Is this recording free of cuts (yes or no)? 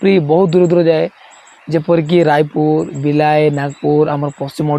yes